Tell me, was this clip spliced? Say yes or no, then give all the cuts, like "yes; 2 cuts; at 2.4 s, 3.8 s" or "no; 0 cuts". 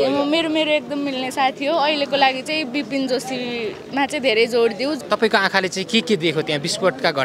yes; 1 cut; at 5.0 s